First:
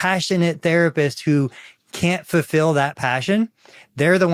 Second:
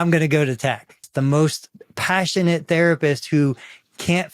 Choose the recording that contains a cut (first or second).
second